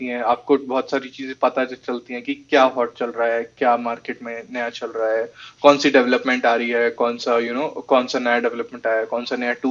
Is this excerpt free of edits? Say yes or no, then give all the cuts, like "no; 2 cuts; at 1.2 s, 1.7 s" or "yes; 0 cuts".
yes; 0 cuts